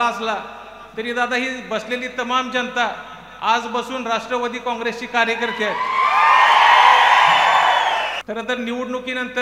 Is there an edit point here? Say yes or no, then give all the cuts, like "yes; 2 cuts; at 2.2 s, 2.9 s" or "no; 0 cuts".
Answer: yes; 1 cut; at 8.2 s